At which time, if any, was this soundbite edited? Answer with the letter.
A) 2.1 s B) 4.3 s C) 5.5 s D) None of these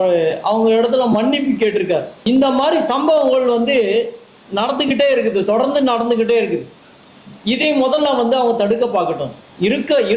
A